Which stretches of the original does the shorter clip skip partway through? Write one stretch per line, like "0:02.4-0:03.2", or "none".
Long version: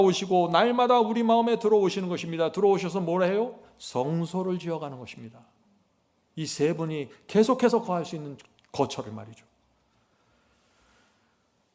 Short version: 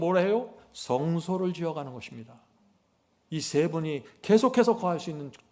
none